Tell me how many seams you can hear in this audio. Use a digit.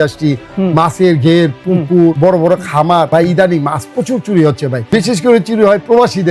3